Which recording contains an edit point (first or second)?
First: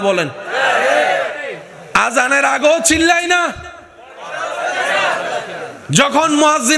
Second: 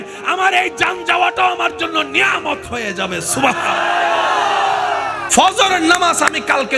second